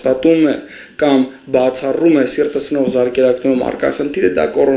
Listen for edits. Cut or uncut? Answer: uncut